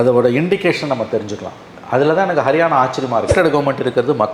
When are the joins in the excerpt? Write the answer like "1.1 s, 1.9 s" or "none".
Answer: 3.3 s